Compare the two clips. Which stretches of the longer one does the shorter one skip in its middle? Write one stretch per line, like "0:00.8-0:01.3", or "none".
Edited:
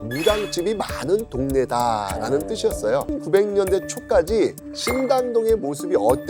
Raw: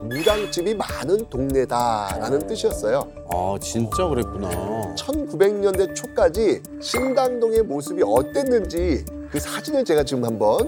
0:03.1-0:05.2